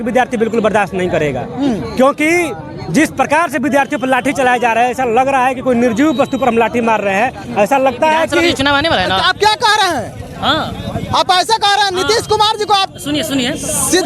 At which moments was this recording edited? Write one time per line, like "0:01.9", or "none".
0:08.6